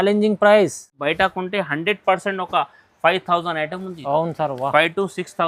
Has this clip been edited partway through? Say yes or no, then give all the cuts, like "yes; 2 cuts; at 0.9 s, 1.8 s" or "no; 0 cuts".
yes; 1 cut; at 1.0 s